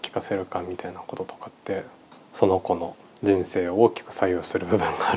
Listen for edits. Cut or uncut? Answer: cut